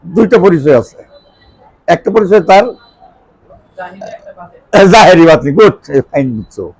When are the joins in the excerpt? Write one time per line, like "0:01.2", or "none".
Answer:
none